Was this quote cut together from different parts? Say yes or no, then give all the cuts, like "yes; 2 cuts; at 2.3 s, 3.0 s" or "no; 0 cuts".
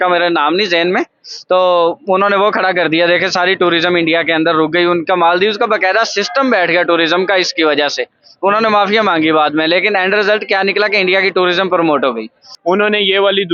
yes; 1 cut; at 12.5 s